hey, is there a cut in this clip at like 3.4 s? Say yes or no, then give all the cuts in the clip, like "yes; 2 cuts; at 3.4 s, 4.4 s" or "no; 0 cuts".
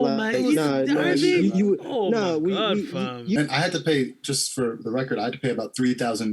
yes; 1 cut; at 3.4 s